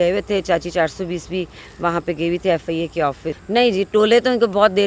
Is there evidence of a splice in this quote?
yes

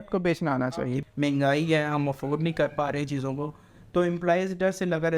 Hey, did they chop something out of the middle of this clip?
yes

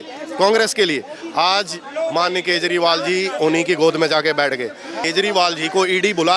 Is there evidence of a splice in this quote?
yes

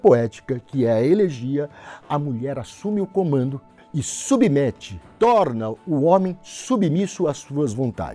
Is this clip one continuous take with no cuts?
yes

